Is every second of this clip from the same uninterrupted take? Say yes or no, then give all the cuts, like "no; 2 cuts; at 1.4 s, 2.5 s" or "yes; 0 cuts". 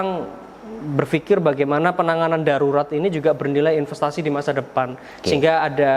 yes; 0 cuts